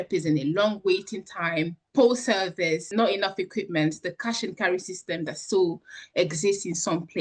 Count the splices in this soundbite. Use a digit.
0